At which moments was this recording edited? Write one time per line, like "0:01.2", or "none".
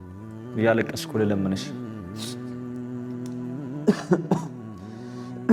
none